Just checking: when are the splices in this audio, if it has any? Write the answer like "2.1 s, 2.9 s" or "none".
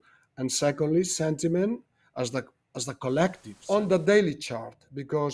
3.5 s